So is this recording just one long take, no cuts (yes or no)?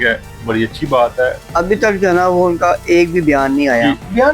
no